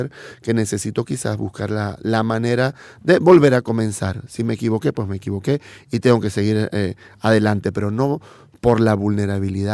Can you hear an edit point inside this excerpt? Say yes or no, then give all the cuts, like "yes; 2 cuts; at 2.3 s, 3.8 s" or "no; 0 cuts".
no; 0 cuts